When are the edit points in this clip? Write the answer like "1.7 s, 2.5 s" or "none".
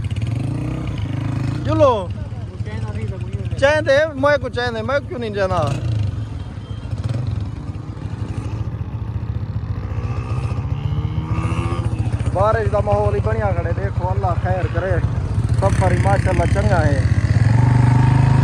none

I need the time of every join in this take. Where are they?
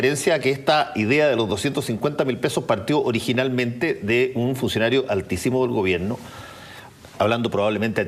4.6 s

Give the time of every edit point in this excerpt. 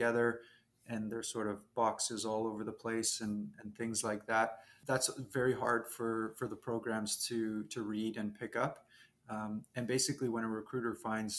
4.7 s

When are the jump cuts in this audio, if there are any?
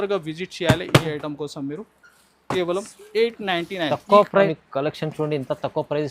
4.5 s

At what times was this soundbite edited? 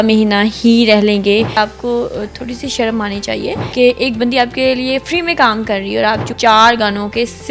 1.6 s, 3.6 s, 6.3 s

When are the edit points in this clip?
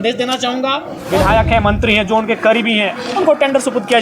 0.9 s

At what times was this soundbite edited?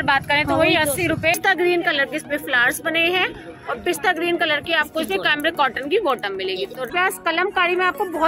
1.3 s, 6.9 s

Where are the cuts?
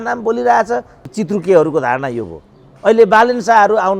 1.1 s

